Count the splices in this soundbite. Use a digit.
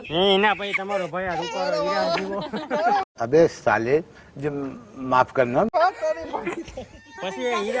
0